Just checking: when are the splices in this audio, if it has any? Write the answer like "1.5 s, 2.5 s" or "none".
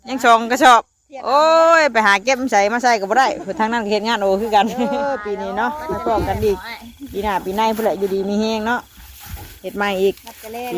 5.1 s

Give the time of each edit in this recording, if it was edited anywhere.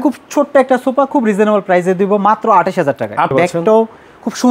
3.3 s

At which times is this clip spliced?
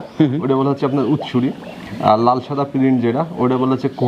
none

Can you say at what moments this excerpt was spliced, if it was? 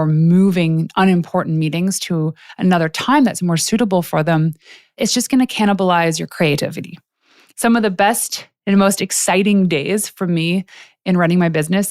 4.9 s, 7.4 s

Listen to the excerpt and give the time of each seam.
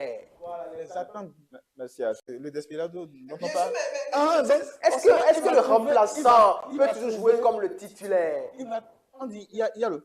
2.2 s

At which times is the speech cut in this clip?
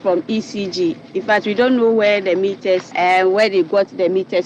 2.9 s

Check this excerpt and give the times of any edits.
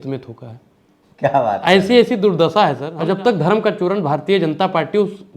2.9 s

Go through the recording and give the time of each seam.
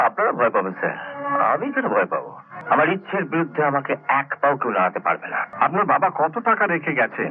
2.5 s, 5.4 s

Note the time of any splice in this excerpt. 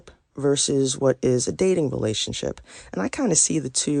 none

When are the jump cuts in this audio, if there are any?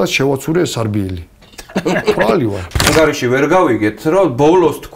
2.9 s

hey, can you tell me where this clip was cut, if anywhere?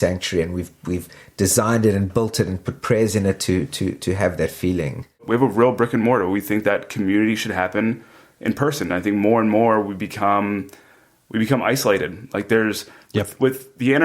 5.2 s

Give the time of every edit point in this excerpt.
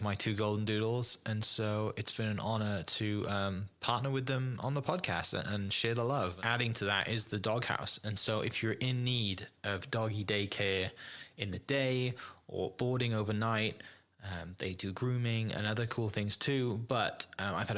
6.4 s

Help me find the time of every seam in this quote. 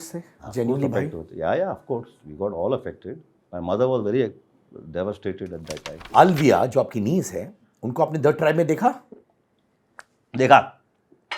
6.0 s

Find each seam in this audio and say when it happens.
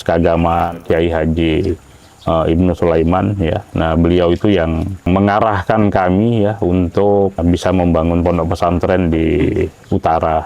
0.8 s, 5.1 s, 7.4 s

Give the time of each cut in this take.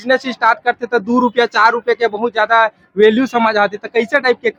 none

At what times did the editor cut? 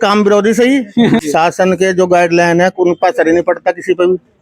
1.2 s

